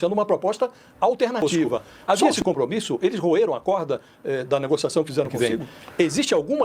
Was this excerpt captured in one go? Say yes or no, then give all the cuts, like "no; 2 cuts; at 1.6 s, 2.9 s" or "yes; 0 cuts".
no; 2 cuts; at 1.9 s, 5.3 s